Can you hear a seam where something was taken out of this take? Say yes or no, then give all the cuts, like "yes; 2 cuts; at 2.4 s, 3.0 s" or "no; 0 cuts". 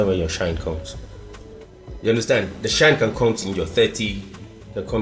no; 0 cuts